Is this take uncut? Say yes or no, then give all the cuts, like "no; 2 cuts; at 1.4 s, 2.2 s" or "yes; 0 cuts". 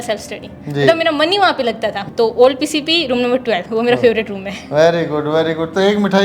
yes; 0 cuts